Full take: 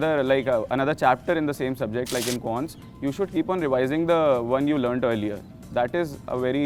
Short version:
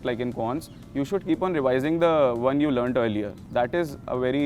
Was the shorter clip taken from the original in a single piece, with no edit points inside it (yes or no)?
no